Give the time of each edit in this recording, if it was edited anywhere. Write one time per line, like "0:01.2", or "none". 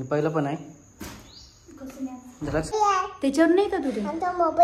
0:02.7